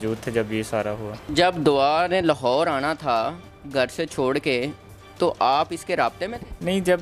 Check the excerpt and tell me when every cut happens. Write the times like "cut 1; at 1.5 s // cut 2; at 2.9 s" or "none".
none